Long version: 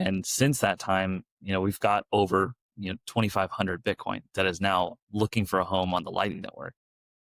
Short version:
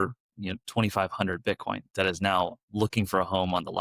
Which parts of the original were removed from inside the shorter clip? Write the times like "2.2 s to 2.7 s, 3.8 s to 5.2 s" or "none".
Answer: none